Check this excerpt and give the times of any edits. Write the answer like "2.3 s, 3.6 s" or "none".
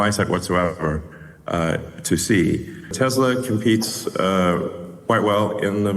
2.8 s